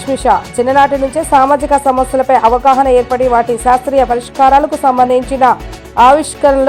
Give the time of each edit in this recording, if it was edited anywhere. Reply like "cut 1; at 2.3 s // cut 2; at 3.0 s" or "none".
none